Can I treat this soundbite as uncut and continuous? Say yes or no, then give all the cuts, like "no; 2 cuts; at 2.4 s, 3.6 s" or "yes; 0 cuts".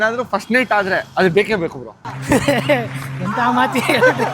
no; 1 cut; at 1.9 s